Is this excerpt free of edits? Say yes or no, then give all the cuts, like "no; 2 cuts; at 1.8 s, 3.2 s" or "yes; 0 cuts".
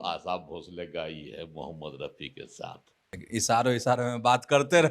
no; 1 cut; at 3.2 s